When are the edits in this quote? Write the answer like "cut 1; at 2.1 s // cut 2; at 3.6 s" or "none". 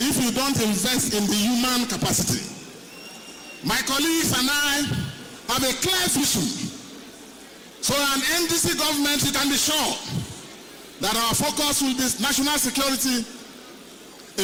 none